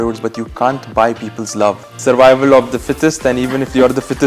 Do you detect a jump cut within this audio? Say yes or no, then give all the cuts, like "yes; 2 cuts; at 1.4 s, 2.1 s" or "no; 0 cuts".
yes; 1 cut; at 1.9 s